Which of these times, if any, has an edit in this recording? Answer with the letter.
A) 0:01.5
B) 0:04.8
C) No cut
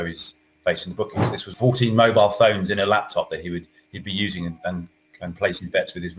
A